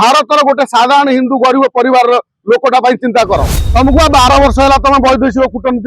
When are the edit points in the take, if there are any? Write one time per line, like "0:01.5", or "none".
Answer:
0:03.6